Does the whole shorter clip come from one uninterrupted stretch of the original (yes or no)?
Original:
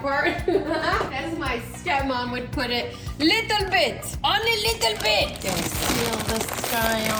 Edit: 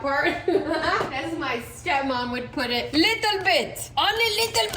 no